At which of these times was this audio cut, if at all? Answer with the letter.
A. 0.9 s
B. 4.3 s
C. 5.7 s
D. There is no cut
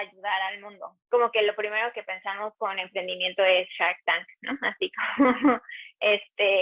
A